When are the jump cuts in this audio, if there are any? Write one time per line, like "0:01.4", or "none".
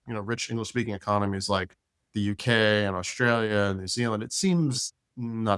none